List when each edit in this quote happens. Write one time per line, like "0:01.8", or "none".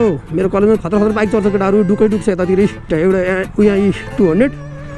0:02.9